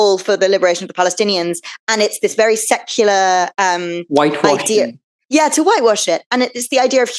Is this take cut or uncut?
uncut